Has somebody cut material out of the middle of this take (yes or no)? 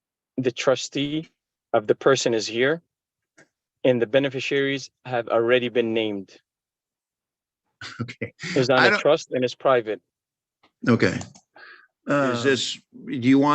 yes